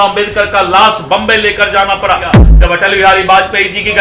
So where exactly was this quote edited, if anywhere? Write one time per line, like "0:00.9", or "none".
0:02.5